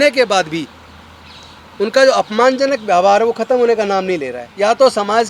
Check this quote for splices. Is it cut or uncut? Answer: cut